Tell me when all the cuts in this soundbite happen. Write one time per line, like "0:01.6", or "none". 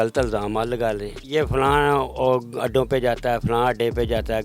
0:01.1